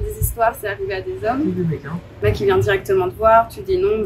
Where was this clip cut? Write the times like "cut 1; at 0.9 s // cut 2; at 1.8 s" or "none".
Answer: cut 1; at 2.2 s